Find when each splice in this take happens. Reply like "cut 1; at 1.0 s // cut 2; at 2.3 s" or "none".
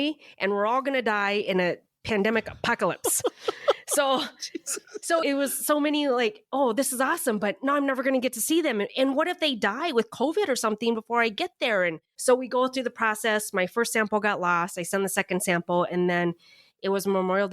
cut 1; at 12.1 s